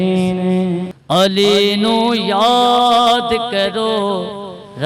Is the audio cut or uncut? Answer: cut